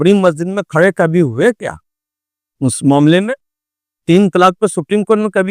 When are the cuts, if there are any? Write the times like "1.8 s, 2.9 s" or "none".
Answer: none